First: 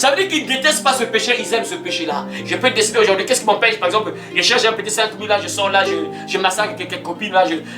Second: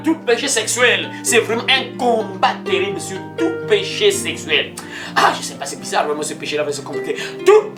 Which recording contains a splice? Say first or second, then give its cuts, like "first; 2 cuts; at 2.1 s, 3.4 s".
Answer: first; 1 cut; at 2.3 s